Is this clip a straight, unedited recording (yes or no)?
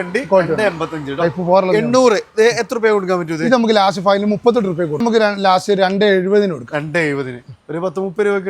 no